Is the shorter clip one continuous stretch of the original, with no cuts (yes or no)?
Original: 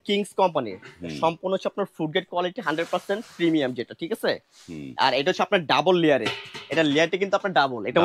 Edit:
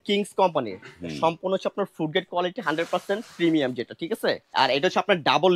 no